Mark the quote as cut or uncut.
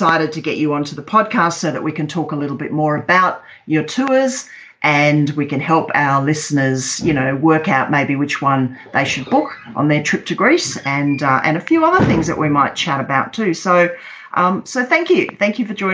uncut